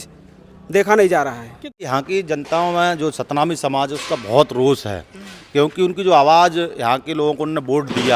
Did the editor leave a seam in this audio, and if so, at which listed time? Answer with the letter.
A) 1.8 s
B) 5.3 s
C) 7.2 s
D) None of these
A